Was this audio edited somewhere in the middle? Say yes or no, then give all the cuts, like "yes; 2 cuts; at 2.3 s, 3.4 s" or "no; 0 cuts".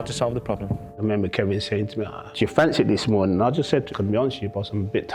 yes; 3 cuts; at 0.9 s, 2.3 s, 3.9 s